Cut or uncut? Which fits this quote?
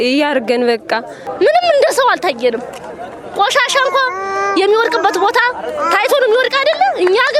cut